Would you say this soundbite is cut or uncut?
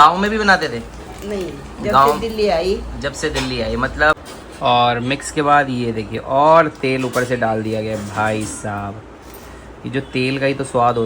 cut